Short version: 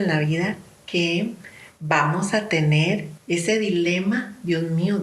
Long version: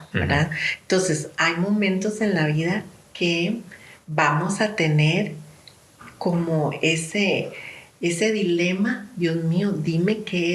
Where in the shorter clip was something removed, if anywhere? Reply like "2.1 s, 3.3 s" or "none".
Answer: 3.1 s